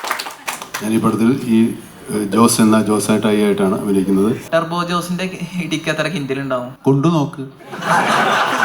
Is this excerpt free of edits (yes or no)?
no